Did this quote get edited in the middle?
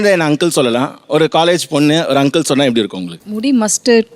yes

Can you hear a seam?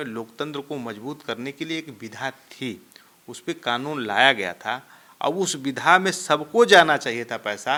no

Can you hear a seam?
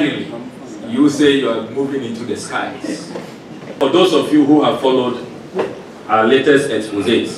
yes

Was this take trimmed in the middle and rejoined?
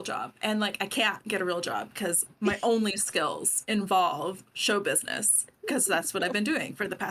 no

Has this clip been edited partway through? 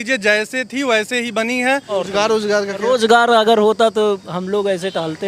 yes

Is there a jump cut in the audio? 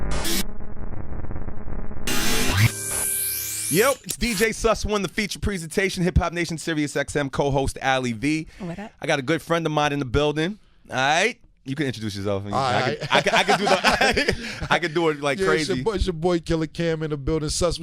yes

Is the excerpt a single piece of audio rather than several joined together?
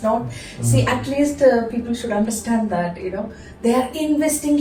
yes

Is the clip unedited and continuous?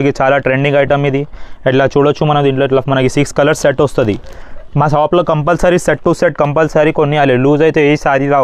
yes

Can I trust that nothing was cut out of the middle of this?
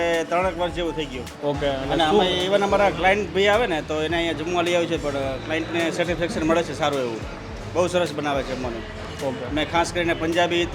no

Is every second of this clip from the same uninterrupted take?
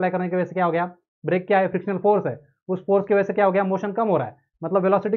yes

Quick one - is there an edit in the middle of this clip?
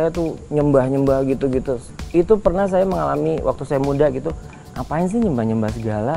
no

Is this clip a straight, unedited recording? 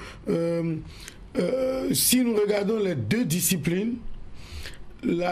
no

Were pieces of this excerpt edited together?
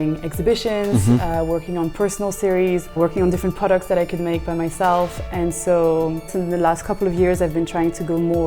yes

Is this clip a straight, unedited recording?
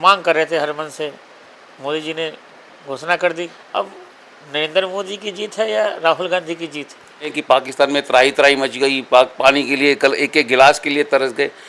no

